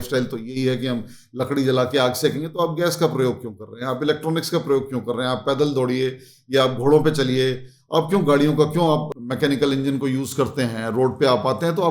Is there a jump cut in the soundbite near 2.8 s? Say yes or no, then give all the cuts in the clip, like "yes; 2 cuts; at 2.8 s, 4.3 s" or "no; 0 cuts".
no; 1 cut; at 9.1 s